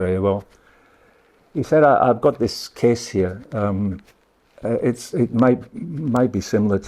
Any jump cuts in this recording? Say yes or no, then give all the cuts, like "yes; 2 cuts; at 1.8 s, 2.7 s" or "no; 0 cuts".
no; 0 cuts